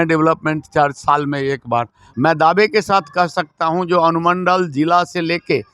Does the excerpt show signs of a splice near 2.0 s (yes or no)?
yes